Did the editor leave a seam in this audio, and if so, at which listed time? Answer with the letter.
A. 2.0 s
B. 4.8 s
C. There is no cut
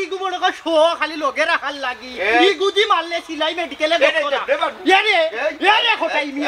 C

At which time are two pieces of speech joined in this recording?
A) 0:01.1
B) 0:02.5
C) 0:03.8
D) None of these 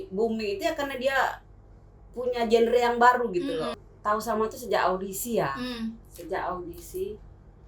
C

